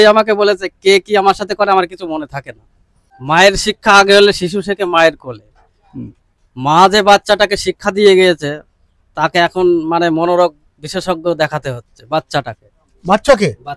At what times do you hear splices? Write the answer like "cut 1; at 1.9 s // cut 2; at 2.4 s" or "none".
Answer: cut 1; at 3.1 s